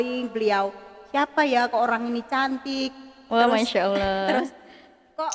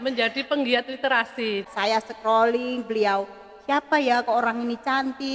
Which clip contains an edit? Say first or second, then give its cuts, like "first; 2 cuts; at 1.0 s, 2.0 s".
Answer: second; 1 cut; at 1.6 s